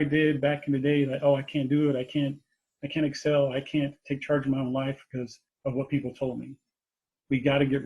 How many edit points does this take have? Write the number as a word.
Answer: one